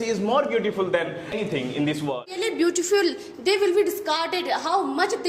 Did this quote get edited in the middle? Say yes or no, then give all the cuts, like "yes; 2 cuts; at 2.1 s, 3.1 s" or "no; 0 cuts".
yes; 2 cuts; at 1.3 s, 2.4 s